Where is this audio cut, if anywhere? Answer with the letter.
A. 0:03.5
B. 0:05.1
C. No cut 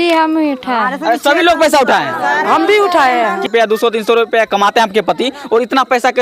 A